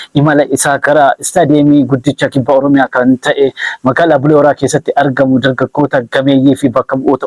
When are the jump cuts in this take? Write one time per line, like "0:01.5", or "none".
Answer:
none